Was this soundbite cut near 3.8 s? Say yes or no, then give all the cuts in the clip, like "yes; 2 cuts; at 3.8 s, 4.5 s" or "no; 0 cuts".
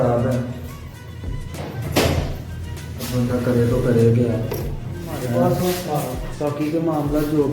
no; 1 cut; at 5.2 s